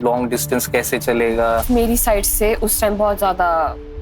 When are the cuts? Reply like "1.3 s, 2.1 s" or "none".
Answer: 1.6 s